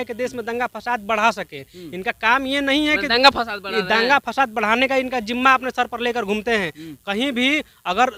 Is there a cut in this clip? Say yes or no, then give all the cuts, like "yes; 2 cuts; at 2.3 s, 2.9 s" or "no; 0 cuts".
no; 0 cuts